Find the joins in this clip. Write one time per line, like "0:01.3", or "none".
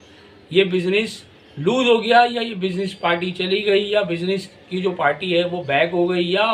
none